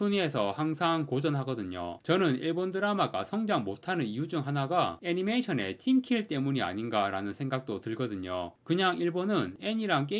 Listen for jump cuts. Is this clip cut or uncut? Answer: cut